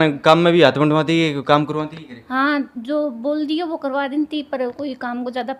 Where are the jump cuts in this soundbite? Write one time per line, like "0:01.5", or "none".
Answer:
none